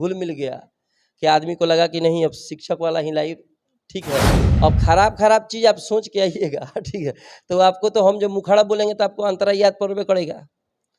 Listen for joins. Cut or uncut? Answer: cut